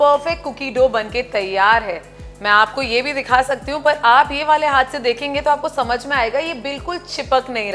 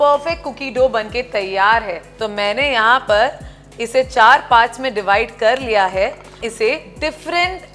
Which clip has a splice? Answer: second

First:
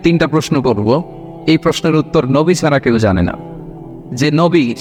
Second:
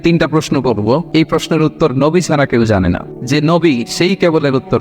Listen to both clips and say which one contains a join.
second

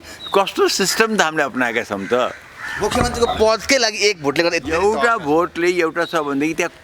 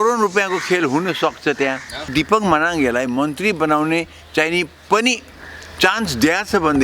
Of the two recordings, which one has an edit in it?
second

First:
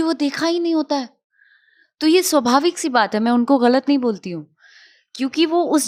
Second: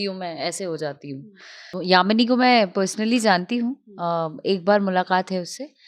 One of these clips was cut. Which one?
second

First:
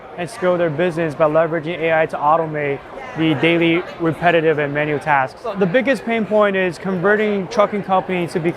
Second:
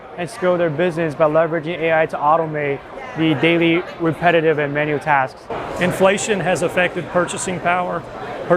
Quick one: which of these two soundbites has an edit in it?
second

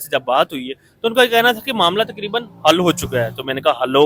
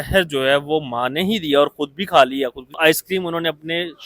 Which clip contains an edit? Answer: second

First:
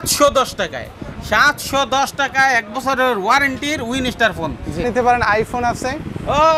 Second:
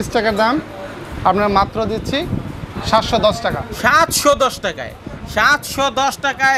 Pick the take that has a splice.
first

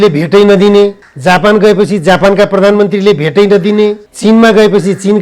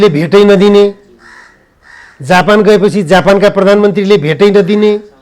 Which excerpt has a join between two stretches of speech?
first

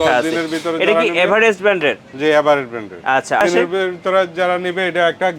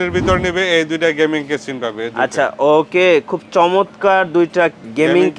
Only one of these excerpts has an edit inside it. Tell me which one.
first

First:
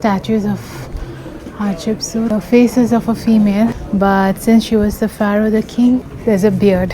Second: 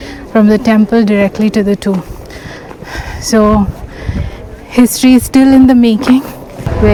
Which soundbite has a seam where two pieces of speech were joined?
first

